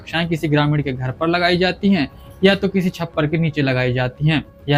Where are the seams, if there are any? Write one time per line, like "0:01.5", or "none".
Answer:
none